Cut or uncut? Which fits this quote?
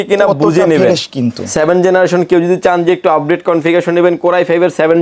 cut